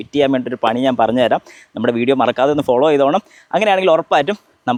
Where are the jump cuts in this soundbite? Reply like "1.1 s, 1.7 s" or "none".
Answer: none